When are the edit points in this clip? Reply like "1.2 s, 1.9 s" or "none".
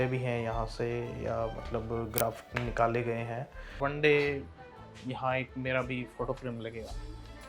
3.8 s